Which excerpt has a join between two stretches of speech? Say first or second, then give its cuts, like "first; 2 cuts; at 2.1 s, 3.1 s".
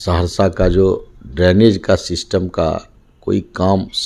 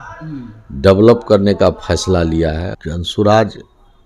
second; 1 cut; at 2.7 s